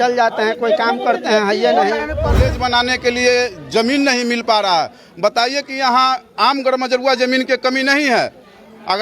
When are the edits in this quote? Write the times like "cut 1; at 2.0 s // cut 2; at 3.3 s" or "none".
cut 1; at 2.5 s